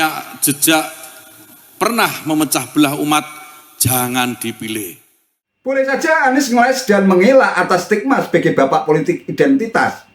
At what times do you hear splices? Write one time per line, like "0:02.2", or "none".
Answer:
0:05.7